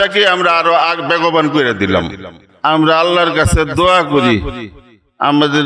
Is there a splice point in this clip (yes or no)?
yes